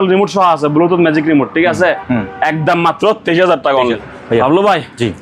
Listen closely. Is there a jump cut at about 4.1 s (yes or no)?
yes